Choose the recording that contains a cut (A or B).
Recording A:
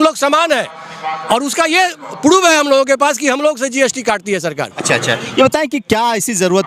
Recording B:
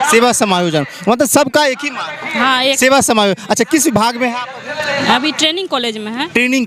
A